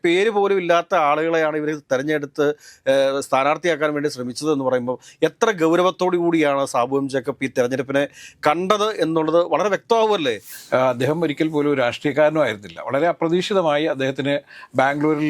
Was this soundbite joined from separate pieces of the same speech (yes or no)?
yes